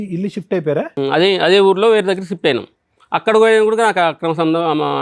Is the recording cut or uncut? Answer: cut